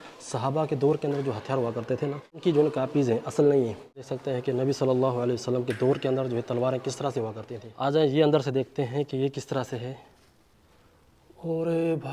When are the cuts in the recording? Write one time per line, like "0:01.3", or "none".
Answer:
0:02.3
0:04.1
0:07.8